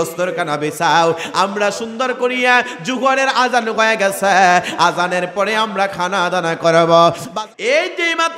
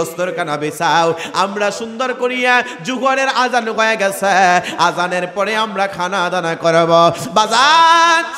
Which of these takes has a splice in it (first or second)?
first